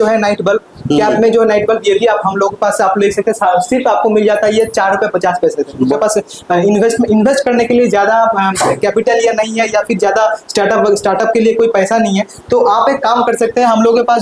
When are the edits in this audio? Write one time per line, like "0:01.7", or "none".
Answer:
0:05.8